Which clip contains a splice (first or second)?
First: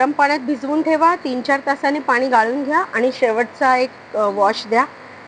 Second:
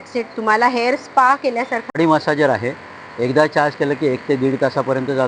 second